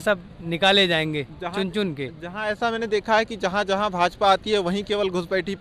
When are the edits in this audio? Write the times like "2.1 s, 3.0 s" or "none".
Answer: none

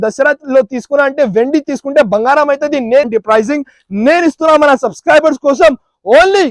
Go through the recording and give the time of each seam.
3.1 s

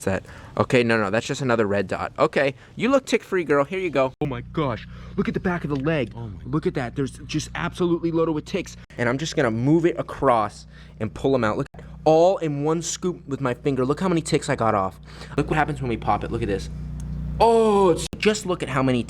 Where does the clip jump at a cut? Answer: 4.4 s, 8.8 s, 11.7 s, 15.5 s, 18.2 s

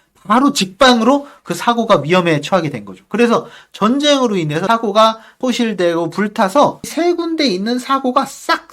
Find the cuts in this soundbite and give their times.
4.6 s, 5.4 s, 6.8 s

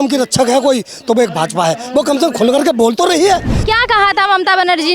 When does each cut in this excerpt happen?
3.5 s

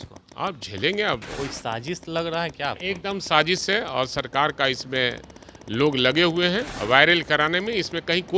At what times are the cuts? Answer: 1.4 s, 6.7 s

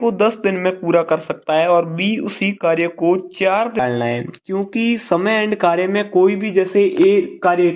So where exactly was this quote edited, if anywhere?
3.8 s

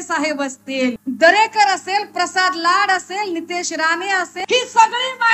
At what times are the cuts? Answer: 1.0 s, 4.3 s

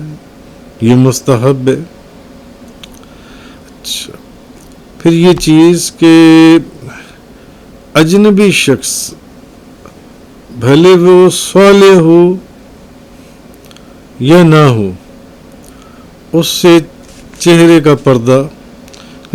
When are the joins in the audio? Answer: none

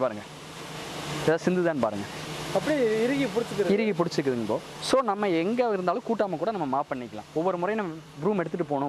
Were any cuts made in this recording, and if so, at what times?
none

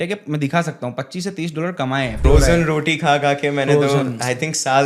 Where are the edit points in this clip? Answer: 2.2 s

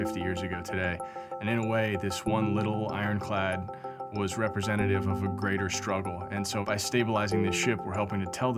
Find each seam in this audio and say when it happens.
none

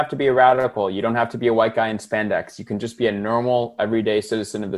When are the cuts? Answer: none

